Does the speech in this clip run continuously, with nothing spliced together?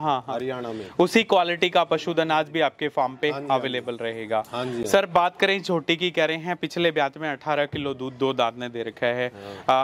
yes; 0 cuts

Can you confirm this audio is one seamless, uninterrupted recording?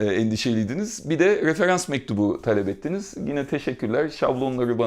yes; 0 cuts

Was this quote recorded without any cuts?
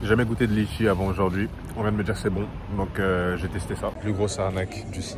no; 2 cuts; at 1.6 s, 4.0 s

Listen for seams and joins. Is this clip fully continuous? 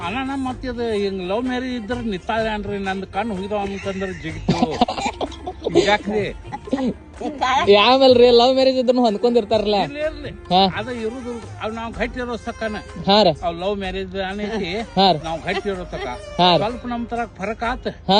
yes; 0 cuts

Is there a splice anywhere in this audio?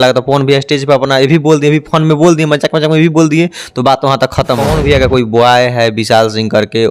yes; 1 cut; at 4.6 s

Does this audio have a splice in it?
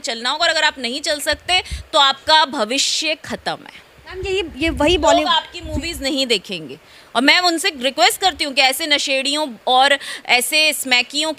no; 0 cuts

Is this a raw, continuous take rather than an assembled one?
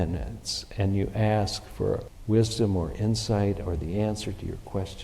no; 1 cut; at 2.1 s

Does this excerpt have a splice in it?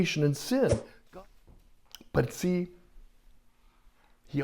yes; 1 cut; at 0.9 s

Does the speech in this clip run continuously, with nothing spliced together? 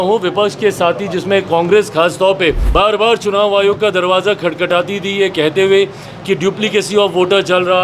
no; 1 cut; at 2.6 s

